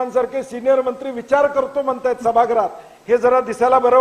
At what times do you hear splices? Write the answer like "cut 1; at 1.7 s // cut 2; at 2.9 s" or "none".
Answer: none